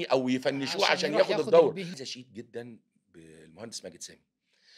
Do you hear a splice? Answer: yes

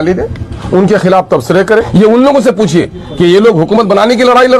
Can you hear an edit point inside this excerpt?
yes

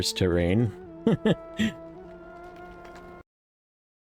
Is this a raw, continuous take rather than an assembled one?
yes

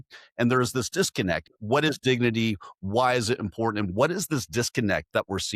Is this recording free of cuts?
no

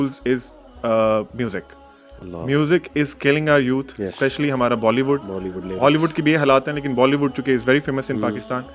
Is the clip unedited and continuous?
yes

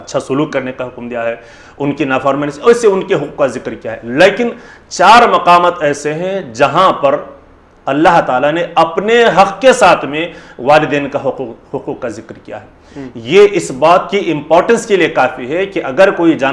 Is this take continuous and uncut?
yes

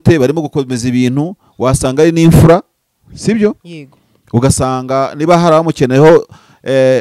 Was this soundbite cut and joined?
no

